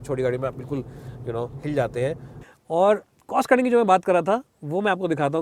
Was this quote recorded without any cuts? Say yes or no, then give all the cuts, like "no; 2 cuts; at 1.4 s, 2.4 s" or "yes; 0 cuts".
no; 1 cut; at 2.4 s